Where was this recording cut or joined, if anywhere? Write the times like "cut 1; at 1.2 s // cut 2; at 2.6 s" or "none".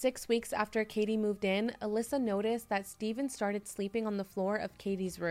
none

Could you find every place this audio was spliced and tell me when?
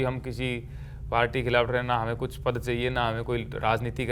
none

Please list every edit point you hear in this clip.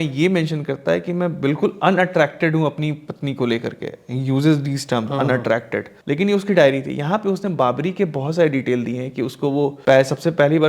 cut 1; at 5.9 s // cut 2; at 9.8 s

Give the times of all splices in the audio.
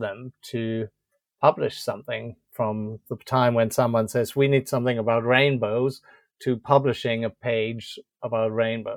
none

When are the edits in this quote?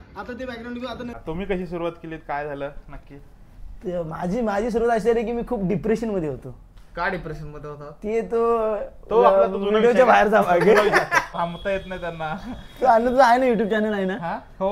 cut 1; at 1.1 s // cut 2; at 11.3 s

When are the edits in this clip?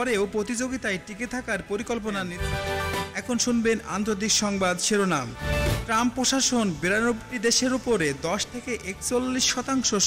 cut 1; at 2.3 s

